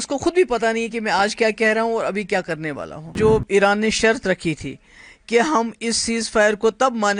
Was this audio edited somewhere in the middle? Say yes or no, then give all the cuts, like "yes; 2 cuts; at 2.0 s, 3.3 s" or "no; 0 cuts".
yes; 1 cut; at 3.1 s